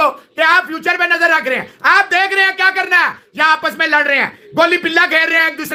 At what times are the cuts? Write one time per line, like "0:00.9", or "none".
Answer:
none